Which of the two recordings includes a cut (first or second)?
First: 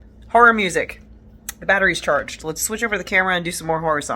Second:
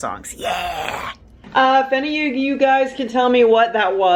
second